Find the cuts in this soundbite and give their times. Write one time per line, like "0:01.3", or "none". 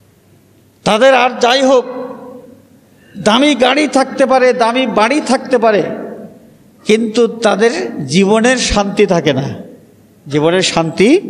none